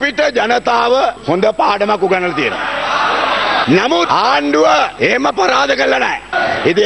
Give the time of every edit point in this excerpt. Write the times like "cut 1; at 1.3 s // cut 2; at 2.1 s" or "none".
none

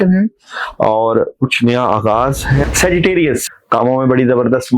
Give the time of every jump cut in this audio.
cut 1; at 2.7 s // cut 2; at 3.4 s

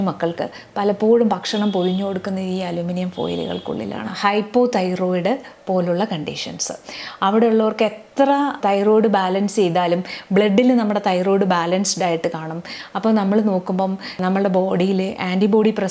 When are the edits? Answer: cut 1; at 4.1 s // cut 2; at 8.6 s // cut 3; at 14.1 s

